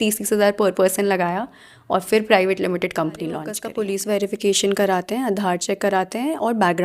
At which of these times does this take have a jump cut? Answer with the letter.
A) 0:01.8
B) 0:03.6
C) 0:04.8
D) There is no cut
B